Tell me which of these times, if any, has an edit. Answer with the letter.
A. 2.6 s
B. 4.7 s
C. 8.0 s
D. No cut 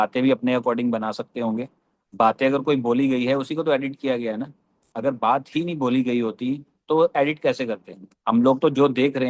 D